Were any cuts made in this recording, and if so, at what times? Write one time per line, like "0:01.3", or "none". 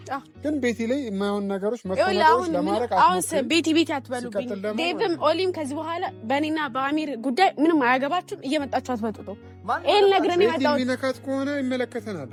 none